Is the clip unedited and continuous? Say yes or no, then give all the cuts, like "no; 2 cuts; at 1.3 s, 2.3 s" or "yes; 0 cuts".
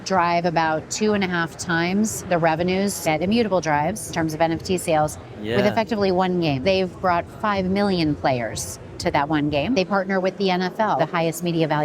no; 5 cuts; at 3.0 s, 4.0 s, 6.6 s, 9.8 s, 11.0 s